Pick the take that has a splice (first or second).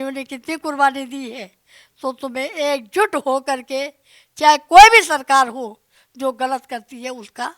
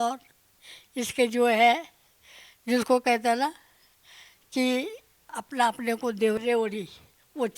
second